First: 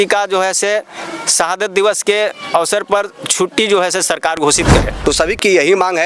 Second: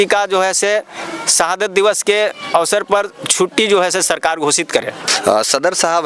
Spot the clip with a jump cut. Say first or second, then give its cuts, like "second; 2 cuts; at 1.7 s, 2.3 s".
first; 1 cut; at 4.9 s